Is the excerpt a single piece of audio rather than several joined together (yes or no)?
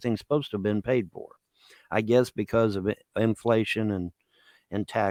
yes